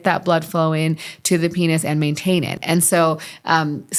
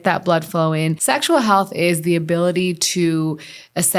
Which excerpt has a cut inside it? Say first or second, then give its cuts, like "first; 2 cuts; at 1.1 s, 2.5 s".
second; 1 cut; at 1.0 s